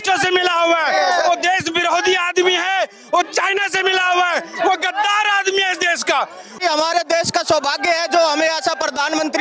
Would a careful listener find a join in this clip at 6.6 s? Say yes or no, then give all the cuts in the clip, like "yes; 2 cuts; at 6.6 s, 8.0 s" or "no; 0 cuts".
yes; 1 cut; at 6.6 s